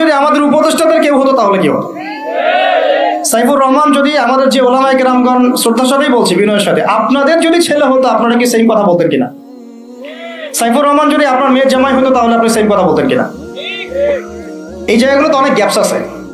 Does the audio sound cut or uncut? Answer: uncut